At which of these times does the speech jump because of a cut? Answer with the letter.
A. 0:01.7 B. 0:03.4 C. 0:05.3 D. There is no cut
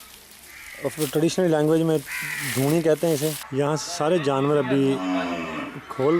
B